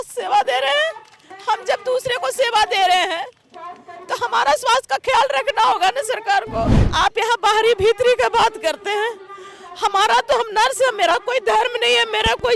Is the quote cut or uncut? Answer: cut